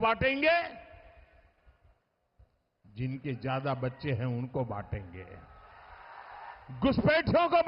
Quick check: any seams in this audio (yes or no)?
yes